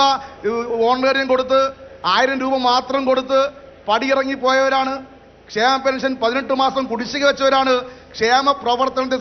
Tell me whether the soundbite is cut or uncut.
uncut